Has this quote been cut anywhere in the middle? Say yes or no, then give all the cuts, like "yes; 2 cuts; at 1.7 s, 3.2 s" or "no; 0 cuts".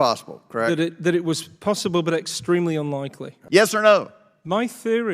yes; 1 cut; at 3.3 s